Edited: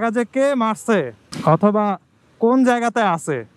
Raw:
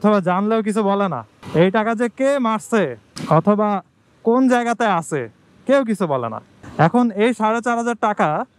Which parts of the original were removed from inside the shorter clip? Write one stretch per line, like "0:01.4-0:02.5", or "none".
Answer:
none